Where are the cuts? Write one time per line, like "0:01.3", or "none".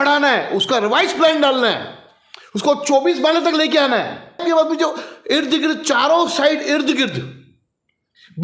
0:04.4